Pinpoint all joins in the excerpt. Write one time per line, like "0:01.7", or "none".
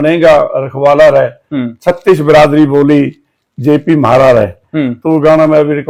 none